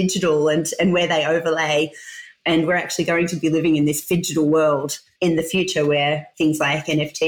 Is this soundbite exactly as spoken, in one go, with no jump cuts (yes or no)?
no